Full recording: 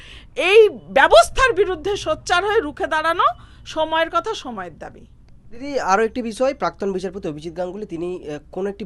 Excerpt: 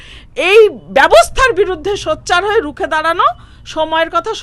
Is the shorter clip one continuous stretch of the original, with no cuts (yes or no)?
yes